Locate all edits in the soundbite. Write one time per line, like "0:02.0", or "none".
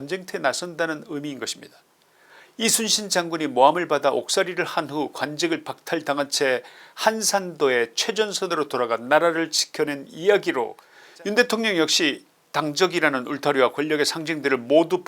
0:10.8